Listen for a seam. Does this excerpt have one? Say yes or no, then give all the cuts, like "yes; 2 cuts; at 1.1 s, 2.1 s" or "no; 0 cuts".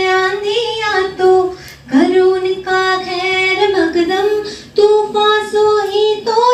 no; 0 cuts